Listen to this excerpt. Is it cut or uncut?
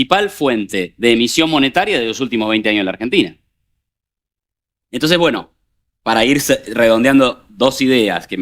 uncut